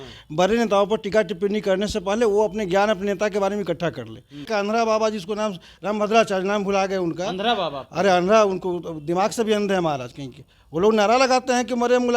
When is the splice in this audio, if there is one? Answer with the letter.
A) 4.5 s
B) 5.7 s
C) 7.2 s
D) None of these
A